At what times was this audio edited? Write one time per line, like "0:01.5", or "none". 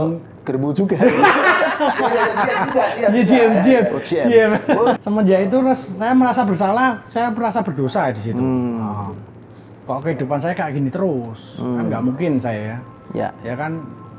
0:05.0